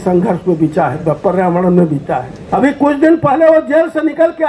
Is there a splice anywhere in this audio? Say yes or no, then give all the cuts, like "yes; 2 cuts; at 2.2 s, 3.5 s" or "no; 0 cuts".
yes; 1 cut; at 2.3 s